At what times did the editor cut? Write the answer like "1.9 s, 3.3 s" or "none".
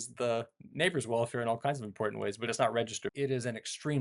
3.0 s